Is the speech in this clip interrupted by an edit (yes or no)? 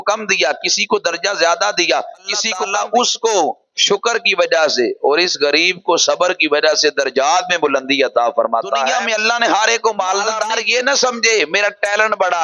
yes